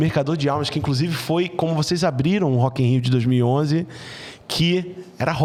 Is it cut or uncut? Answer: uncut